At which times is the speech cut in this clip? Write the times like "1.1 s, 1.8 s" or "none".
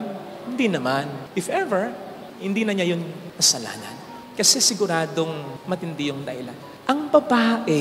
none

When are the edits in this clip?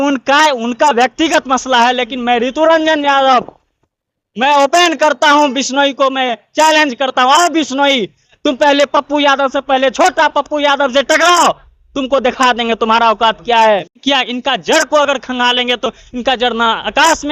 13.9 s

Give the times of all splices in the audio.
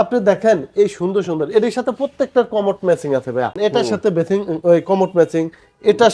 3.5 s

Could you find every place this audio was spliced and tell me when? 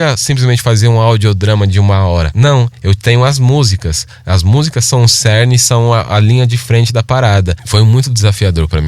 2.3 s, 7.6 s

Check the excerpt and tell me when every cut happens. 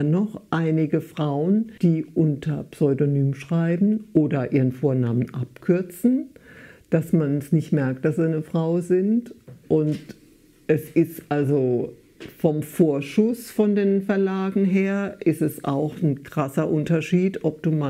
1.7 s

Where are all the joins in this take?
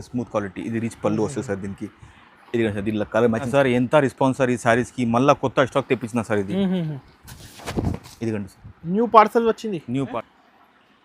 3.5 s, 10.2 s

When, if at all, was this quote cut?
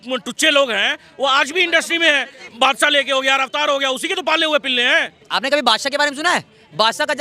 2.4 s, 5.2 s

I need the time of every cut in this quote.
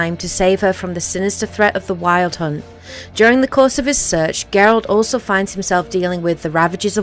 2.6 s

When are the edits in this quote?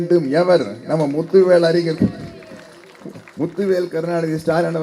none

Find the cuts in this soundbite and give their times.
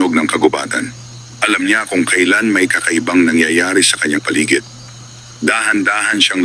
4.2 s

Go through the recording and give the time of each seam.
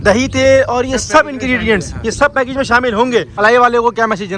3.3 s

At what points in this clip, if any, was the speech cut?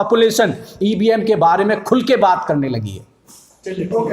none

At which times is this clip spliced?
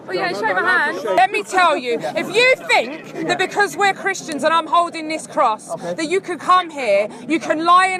1.1 s

